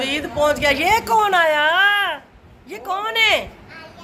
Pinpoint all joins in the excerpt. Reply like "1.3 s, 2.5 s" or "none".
none